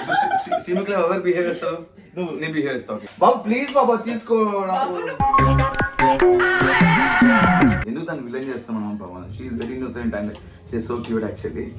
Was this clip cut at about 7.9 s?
yes; 1 cut; at 7.9 s

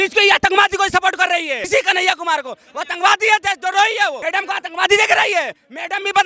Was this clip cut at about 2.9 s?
no; 2 cuts; at 1.6 s, 4.2 s

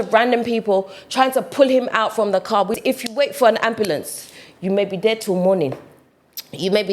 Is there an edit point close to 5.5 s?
no; 1 cut; at 2.8 s

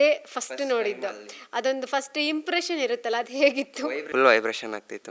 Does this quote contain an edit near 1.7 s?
no; 1 cut; at 4.0 s

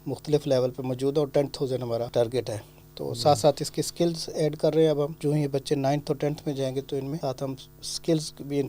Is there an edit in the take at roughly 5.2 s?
yes; 3 cuts; at 2.1 s, 5.2 s, 7.2 s

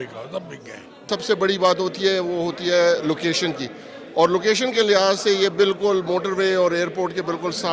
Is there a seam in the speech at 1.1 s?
yes; 1 cut; at 1.1 s

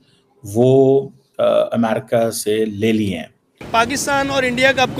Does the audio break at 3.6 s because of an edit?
yes; 1 cut; at 3.6 s

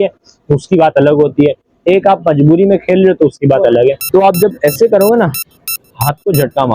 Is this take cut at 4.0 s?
yes; 1 cut; at 4.0 s

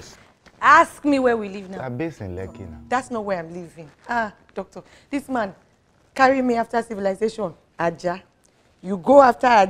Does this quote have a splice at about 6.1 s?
no; 1 cut; at 2.7 s

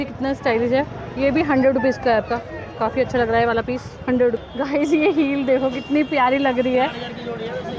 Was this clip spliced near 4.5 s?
yes; 1 cut; at 4.5 s

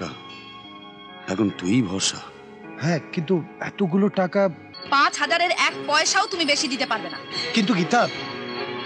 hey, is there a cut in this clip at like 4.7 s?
yes; 1 cut; at 4.7 s

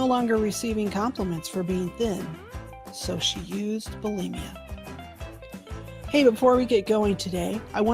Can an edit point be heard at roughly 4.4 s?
yes; 2 cuts; at 4.4 s, 6.1 s

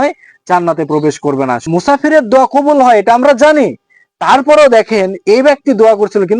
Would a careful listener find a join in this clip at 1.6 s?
yes; 1 cut; at 1.6 s

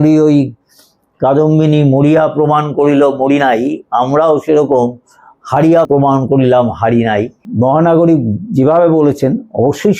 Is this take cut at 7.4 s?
yes; 2 cuts; at 5.9 s, 7.4 s

